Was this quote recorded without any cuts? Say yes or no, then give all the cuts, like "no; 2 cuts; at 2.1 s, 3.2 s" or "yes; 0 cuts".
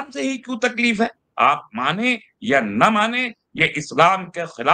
no; 1 cut; at 1.2 s